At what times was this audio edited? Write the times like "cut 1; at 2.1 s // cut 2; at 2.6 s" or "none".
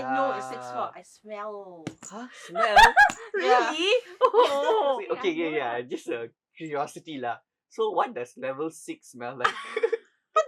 cut 1; at 5.0 s

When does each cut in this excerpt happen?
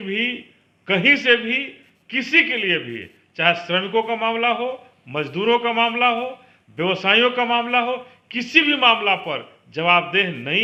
none

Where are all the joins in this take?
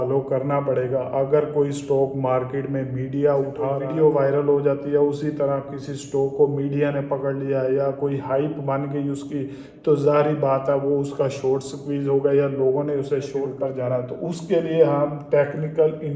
cut 1; at 3.8 s // cut 2; at 13.4 s

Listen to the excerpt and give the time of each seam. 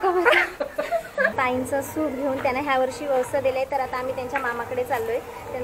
cut 1; at 1.3 s

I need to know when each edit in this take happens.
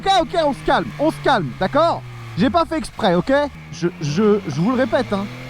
cut 1; at 3.6 s

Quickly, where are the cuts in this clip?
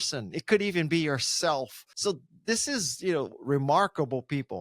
cut 1; at 1.8 s

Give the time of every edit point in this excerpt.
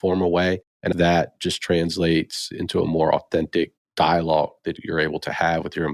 cut 1; at 0.9 s // cut 2; at 2.5 s // cut 3; at 4.8 s

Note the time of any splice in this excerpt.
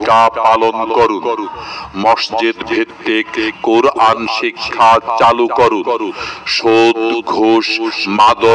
none

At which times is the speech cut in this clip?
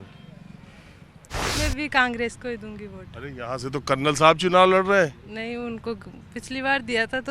cut 1; at 1.5 s

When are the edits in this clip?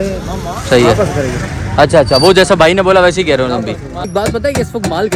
cut 1; at 4.1 s

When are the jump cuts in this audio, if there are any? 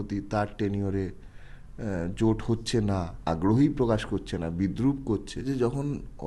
cut 1; at 3.1 s // cut 2; at 5.4 s

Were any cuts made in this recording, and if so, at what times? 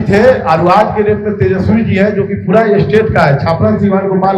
none

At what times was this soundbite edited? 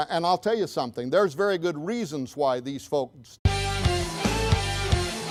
none

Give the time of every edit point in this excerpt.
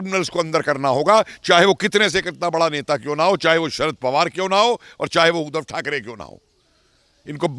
none

